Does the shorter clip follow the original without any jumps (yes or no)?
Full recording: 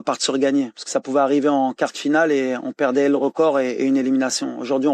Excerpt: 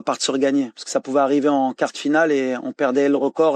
yes